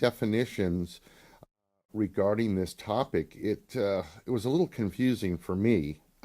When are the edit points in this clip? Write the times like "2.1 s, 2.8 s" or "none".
4.3 s